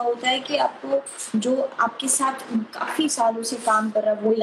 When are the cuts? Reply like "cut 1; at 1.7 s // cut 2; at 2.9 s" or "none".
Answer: none